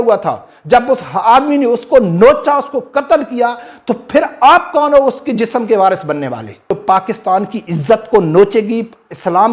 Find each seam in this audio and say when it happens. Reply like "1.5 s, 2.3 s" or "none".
6.7 s